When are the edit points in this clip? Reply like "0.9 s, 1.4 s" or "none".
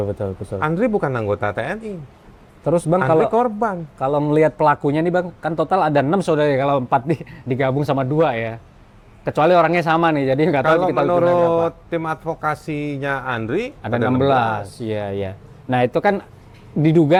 none

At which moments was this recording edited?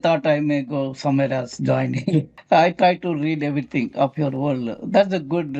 2.3 s

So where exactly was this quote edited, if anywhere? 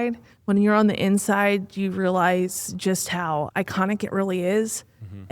3.5 s

